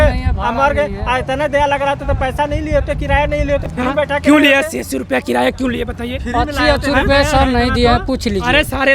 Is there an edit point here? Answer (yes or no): no